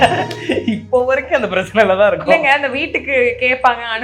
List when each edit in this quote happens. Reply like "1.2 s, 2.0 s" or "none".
none